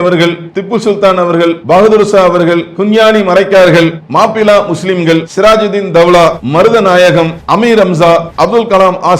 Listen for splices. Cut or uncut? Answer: cut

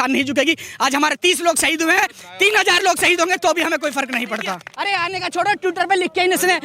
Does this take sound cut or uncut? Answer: cut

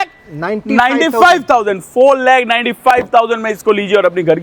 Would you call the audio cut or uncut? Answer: uncut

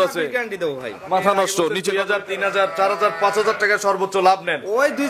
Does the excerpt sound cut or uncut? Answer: cut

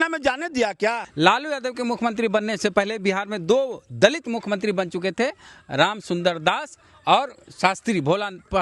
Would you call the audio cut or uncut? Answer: cut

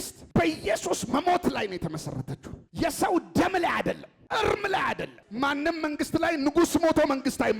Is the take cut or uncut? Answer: cut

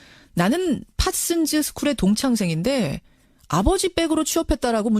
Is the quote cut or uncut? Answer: cut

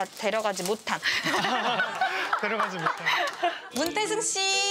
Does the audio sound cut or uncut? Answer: cut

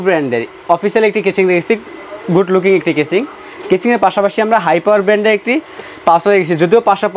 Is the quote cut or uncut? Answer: uncut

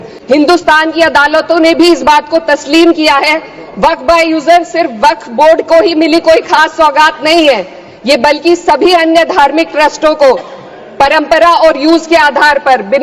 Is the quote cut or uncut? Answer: uncut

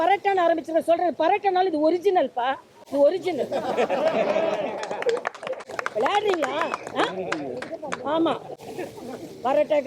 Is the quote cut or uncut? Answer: uncut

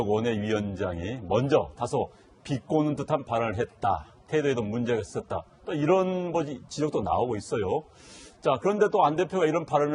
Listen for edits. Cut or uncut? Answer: uncut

